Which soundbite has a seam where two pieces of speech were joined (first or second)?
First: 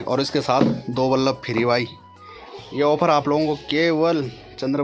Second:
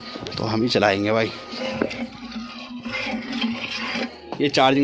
second